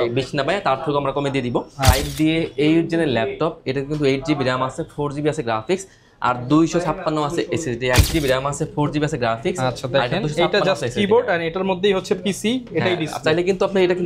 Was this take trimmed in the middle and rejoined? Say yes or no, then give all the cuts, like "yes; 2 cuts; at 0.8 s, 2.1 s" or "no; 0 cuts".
yes; 2 cuts; at 2.0 s, 8.0 s